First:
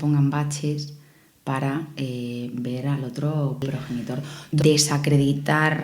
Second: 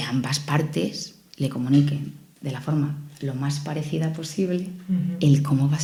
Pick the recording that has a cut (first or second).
first